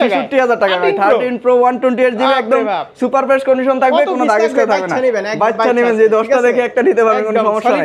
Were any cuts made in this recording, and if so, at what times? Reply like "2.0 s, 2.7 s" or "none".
none